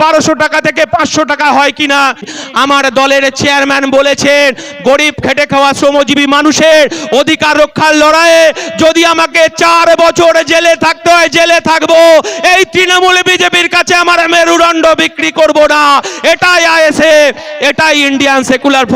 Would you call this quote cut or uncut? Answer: cut